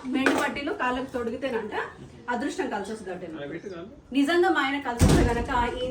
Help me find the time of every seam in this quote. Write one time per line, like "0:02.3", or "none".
0:03.9